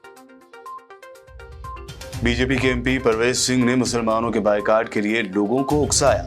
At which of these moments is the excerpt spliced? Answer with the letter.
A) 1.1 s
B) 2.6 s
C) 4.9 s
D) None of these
A